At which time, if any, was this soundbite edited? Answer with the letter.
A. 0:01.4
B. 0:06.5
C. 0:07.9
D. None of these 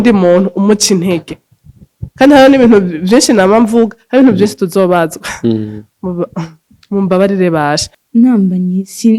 C